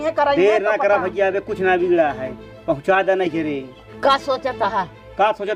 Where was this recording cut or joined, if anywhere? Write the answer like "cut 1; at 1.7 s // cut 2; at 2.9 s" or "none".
none